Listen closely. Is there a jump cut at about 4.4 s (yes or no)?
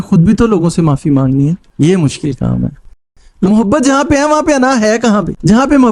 no